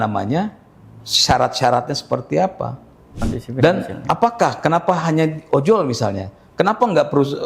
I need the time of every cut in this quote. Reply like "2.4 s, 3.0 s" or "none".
3.2 s